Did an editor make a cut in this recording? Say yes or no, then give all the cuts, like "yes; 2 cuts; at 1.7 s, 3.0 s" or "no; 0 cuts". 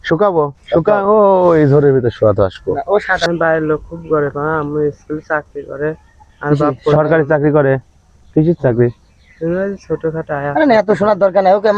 yes; 1 cut; at 3.3 s